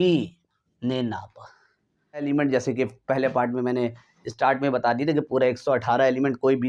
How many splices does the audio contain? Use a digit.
1